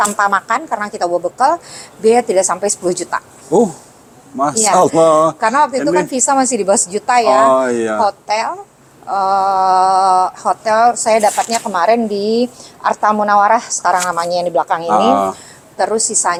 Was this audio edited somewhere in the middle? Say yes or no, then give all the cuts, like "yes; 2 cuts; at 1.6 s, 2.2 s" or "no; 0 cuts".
no; 0 cuts